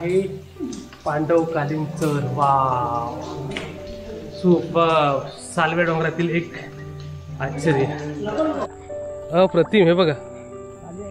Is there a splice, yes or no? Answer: yes